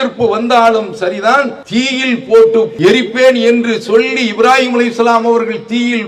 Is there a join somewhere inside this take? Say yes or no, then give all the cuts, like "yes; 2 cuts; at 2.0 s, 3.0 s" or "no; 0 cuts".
yes; 2 cuts; at 1.6 s, 2.7 s